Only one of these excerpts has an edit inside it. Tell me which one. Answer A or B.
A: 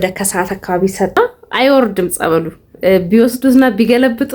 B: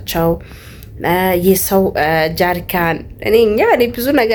A